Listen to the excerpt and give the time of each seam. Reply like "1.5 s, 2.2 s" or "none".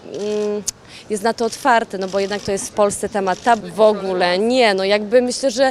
3.7 s

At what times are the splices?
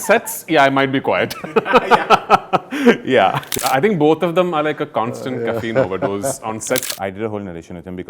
3.4 s, 6.9 s

